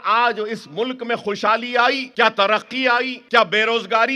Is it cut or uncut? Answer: cut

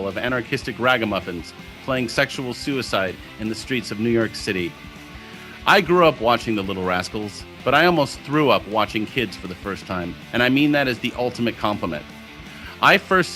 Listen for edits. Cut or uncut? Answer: uncut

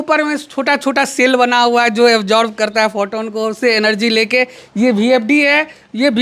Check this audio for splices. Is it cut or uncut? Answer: uncut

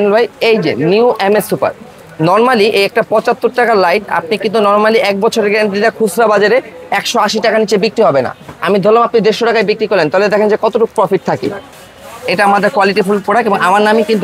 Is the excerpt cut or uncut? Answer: cut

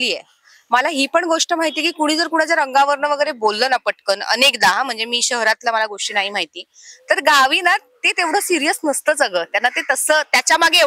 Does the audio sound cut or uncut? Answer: uncut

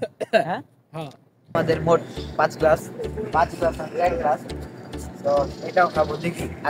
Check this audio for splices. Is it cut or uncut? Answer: cut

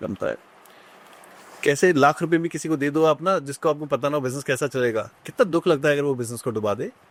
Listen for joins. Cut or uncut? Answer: uncut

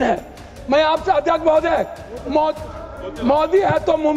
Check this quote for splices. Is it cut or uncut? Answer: uncut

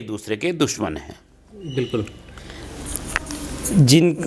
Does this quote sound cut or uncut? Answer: uncut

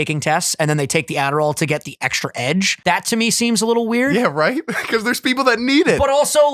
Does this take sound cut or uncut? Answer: cut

